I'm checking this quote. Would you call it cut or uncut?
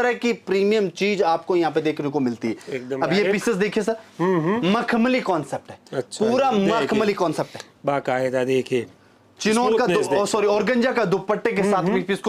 uncut